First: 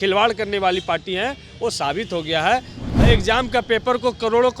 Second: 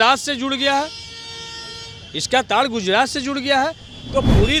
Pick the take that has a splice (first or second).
first